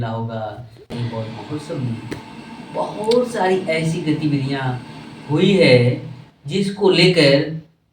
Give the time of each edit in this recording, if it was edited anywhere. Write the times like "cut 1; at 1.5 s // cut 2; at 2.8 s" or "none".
cut 1; at 0.9 s